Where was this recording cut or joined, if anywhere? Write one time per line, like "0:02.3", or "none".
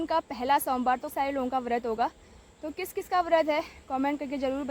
0:01.1